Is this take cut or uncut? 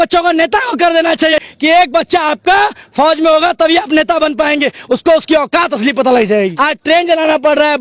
cut